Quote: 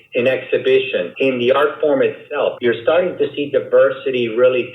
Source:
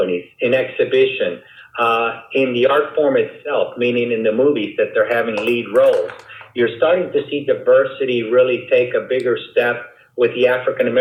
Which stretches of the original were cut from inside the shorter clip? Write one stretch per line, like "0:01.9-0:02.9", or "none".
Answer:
0:01.4-0:02.2
0:03.7-0:06.5

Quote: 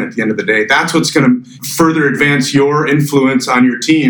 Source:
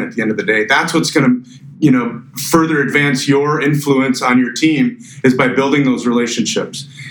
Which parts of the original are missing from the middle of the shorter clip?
0:01.6-0:02.3

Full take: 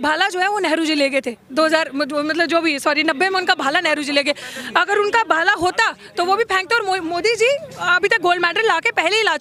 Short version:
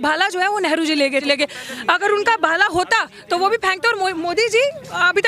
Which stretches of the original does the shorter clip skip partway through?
0:01.2-0:04.1

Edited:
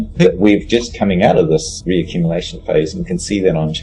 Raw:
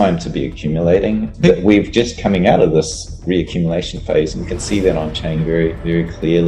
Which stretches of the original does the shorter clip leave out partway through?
0:03.0-0:03.1

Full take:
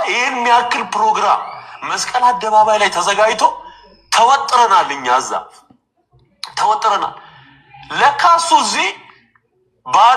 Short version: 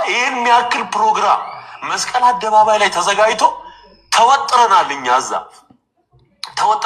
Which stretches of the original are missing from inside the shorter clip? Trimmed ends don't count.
none

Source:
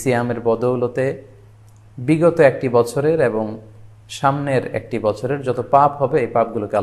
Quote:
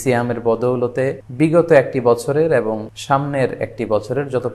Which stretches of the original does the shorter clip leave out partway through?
0:01.2-0:01.9
0:03.6-0:04.0

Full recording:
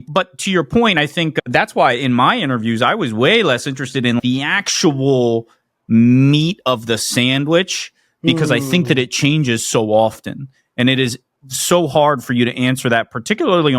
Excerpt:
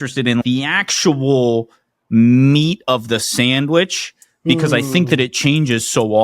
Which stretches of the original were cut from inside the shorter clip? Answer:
none

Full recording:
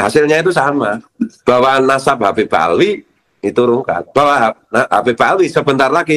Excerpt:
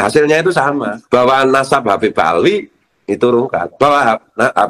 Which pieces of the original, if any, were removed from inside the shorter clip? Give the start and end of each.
0:00.9-0:01.3

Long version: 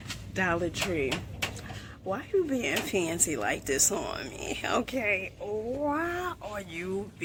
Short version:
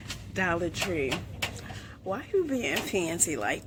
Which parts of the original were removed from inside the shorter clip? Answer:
none

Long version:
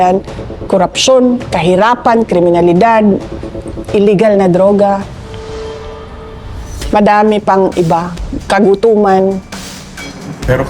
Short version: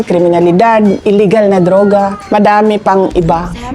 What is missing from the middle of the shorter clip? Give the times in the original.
0:03.2-0:03.9
0:05.1-0:06.8

